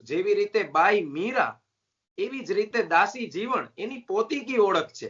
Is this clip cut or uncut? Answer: uncut